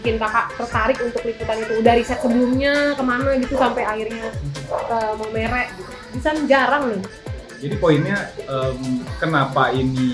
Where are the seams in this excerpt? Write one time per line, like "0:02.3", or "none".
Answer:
0:07.4